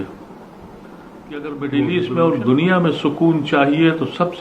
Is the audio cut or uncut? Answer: cut